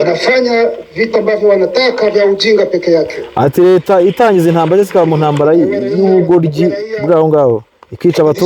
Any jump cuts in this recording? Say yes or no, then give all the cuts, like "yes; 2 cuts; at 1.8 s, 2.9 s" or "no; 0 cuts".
no; 0 cuts